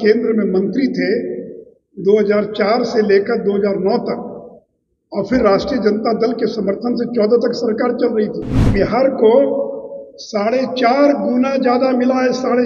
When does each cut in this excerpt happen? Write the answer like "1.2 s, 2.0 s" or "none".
8.7 s